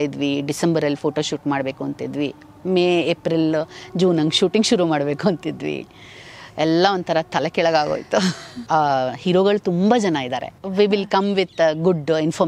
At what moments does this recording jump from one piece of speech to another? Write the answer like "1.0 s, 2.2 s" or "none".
8.5 s, 10.6 s